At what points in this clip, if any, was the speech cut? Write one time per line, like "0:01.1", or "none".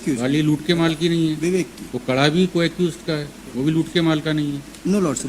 none

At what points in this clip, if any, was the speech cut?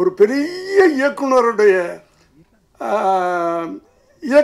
none

